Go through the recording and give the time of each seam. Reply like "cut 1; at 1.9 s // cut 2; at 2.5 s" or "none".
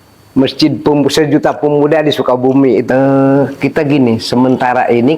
cut 1; at 2.9 s